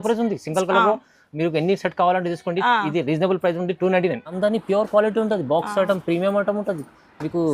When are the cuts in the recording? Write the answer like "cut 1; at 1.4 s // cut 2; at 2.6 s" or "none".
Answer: cut 1; at 4.3 s